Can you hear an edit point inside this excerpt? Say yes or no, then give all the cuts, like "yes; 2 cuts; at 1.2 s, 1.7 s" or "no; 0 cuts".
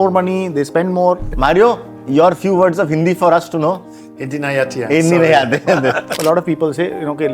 yes; 2 cuts; at 1.3 s, 6.2 s